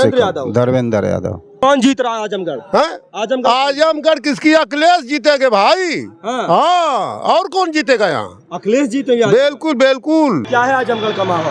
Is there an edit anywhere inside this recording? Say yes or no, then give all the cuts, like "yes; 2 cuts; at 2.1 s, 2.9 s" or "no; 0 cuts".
yes; 2 cuts; at 1.6 s, 10.5 s